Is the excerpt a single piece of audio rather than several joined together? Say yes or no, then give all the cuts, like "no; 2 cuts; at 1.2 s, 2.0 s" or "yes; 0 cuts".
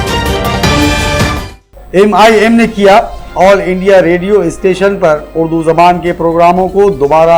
no; 1 cut; at 1.2 s